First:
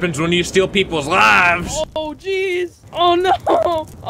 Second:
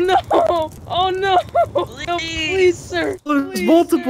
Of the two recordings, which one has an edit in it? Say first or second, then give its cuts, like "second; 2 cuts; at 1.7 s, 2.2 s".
second; 2 cuts; at 2.0 s, 3.2 s